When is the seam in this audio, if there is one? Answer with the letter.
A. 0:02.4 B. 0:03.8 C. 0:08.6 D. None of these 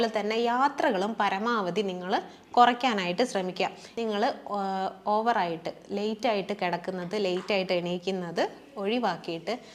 B